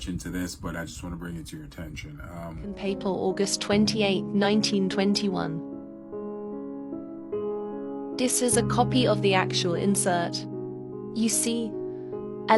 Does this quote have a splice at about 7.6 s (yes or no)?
no